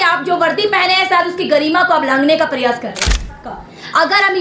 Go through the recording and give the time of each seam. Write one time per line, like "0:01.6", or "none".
0:03.4